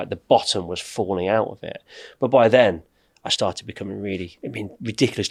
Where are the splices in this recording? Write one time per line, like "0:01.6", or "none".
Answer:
none